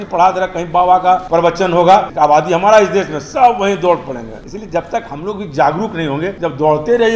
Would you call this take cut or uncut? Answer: cut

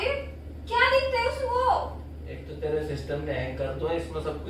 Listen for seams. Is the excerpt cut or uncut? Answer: uncut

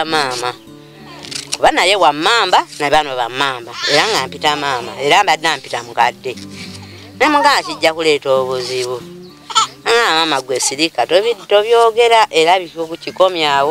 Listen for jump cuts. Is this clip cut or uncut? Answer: uncut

